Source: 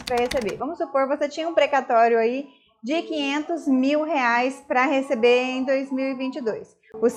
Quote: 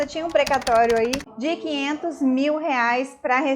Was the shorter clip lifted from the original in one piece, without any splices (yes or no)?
no